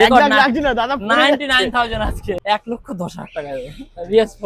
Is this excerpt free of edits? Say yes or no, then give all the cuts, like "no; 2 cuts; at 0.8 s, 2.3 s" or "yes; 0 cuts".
no; 1 cut; at 2.4 s